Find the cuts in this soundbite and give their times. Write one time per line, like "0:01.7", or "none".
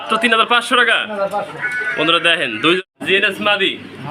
0:02.8